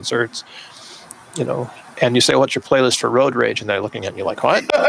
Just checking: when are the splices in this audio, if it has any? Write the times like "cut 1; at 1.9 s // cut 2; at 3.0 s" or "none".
none